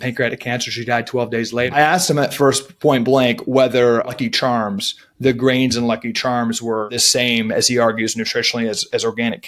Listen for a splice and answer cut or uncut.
cut